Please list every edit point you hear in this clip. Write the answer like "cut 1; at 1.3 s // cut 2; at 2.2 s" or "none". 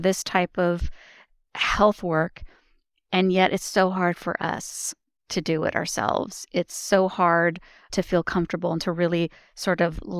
cut 1; at 7.9 s